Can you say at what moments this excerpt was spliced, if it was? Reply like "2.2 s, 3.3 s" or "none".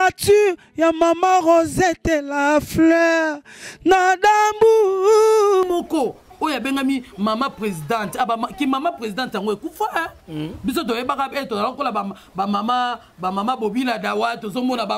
5.7 s